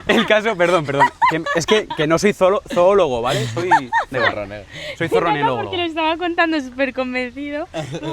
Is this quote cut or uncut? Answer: uncut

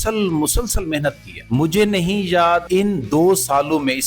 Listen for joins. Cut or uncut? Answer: cut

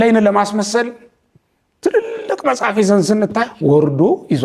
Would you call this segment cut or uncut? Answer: cut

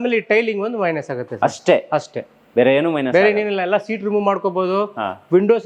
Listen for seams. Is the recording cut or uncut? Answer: uncut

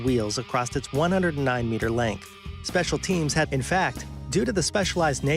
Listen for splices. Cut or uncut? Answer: uncut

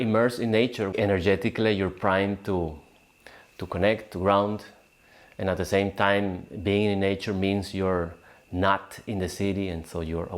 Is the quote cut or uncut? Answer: cut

